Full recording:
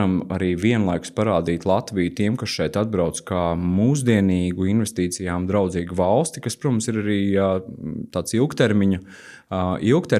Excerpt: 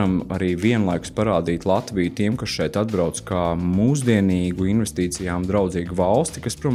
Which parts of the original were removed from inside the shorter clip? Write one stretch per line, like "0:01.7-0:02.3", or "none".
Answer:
none